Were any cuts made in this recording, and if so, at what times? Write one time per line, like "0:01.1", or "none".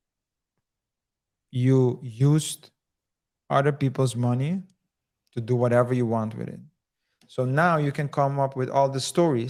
none